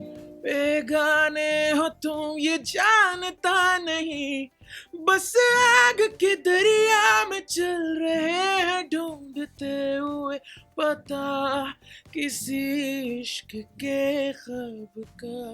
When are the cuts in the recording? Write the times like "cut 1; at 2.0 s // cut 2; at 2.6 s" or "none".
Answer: none